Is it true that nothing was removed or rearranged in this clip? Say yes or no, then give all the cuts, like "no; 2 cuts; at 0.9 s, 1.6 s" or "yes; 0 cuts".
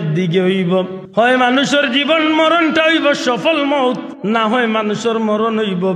no; 2 cuts; at 1.0 s, 4.1 s